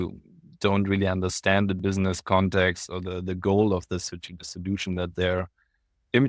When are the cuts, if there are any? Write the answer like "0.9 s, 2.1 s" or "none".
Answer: none